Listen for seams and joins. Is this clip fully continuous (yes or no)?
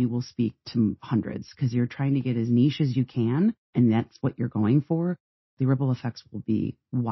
no